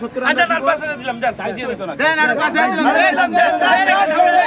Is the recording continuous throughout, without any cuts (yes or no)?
yes